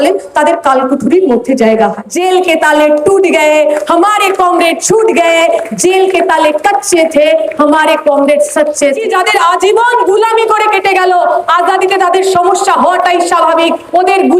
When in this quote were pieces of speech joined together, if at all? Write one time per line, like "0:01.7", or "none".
0:02.1
0:09.0